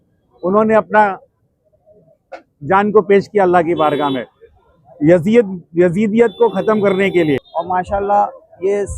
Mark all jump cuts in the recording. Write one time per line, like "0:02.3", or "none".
0:07.5